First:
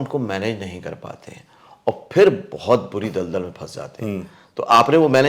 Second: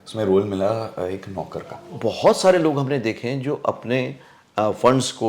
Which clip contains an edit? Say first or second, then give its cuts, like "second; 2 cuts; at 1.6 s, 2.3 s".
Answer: second; 1 cut; at 2.0 s